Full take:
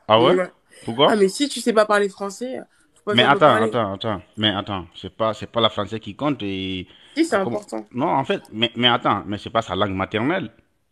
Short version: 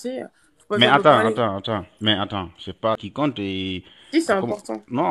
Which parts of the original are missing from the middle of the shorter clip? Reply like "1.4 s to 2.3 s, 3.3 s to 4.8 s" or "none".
5.4 s to 6.1 s